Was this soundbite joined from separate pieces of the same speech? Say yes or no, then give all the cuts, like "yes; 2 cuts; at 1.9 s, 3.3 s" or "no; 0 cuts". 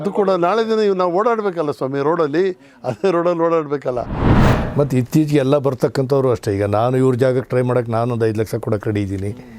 yes; 1 cut; at 4.3 s